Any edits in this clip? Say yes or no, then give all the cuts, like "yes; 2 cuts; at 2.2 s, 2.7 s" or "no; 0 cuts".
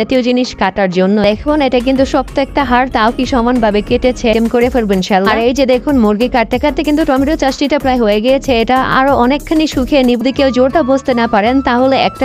yes; 3 cuts; at 1.2 s, 4.3 s, 10.2 s